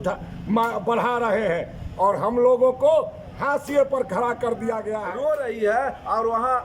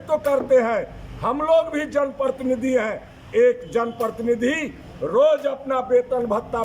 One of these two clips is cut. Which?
first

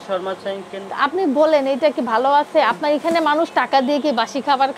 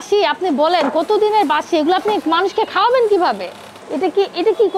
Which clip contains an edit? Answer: second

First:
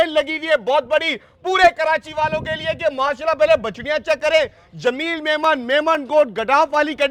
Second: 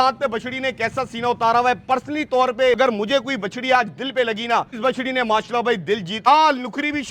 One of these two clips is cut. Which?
second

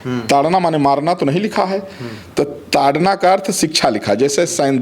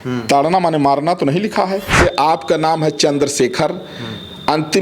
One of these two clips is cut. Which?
second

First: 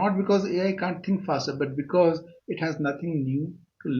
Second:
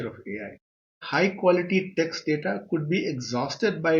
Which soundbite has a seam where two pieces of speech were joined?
second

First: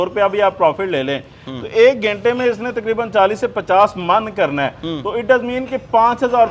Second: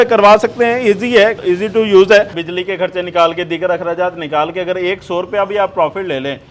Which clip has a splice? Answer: second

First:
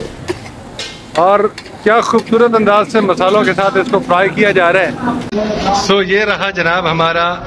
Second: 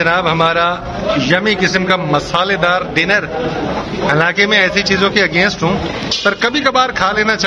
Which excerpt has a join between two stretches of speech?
first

